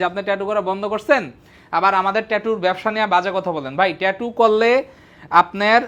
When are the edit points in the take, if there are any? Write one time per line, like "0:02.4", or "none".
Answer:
none